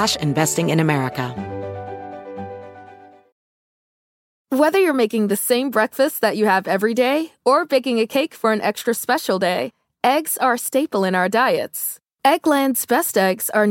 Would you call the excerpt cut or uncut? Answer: cut